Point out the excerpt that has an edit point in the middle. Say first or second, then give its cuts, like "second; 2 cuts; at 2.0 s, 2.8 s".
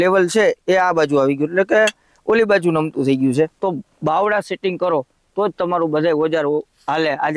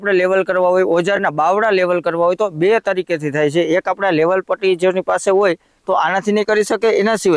first; 1 cut; at 3.6 s